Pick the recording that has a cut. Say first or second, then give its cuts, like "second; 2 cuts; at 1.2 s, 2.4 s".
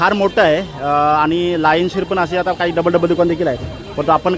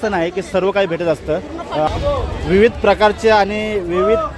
second; 1 cut; at 1.9 s